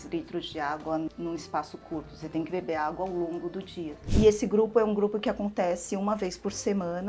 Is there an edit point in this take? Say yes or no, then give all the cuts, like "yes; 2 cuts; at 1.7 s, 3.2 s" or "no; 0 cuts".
yes; 1 cut; at 4.0 s